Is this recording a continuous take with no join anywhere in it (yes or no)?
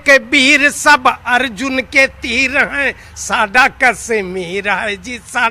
yes